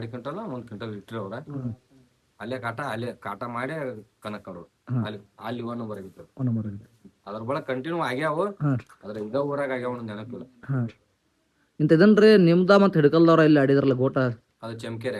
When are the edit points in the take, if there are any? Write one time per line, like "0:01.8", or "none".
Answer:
none